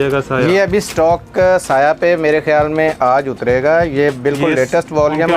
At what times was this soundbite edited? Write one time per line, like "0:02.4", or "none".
none